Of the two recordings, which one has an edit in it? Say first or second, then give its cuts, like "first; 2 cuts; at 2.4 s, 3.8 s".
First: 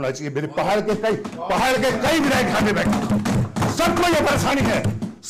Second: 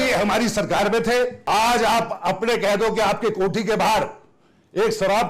second; 1 cut; at 1.4 s